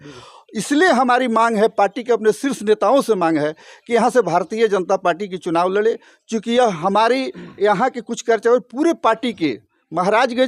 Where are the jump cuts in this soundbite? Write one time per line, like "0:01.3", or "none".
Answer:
none